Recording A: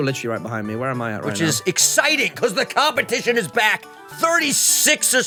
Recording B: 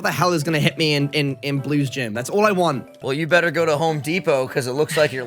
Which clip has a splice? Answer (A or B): B